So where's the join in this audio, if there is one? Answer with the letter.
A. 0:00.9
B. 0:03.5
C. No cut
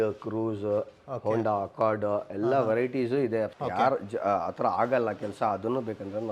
B